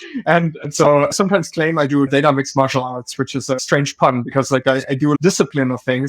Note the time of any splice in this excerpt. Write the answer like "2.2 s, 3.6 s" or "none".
1.1 s, 2.1 s, 3.5 s